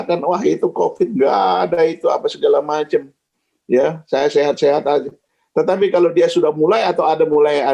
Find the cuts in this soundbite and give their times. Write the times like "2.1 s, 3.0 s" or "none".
none